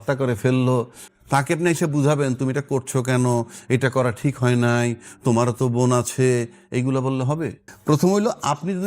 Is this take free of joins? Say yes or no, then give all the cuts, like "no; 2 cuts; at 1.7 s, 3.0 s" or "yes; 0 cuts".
no; 2 cuts; at 1.0 s, 7.7 s